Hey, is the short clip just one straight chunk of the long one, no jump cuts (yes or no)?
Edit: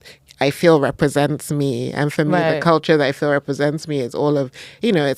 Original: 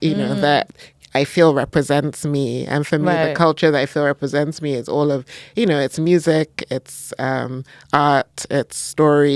yes